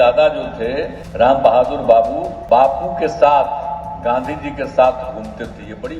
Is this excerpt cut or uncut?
cut